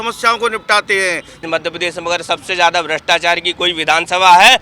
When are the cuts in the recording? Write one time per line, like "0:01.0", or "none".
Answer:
0:01.4